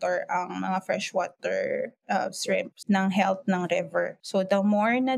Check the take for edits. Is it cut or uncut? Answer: cut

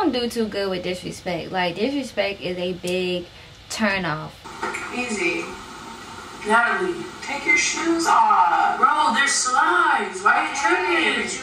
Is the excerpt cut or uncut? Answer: cut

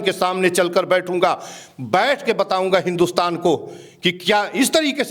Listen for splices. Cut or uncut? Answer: uncut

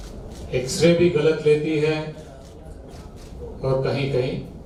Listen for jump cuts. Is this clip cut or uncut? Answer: uncut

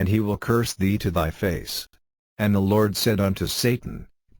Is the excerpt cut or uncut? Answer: cut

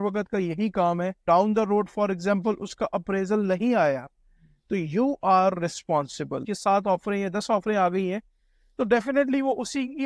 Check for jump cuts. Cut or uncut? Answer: cut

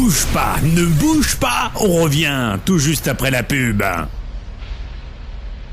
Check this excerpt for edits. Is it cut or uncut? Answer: uncut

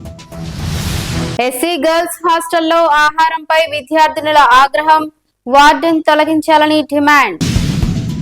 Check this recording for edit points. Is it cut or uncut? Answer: cut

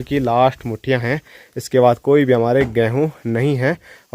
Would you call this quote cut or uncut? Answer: uncut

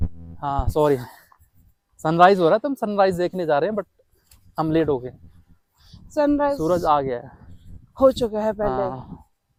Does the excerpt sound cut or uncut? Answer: uncut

